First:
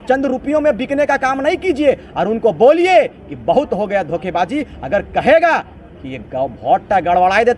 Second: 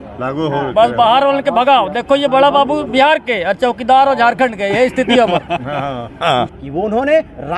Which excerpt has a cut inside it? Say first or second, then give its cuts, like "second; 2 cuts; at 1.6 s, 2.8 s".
second; 1 cut; at 6.6 s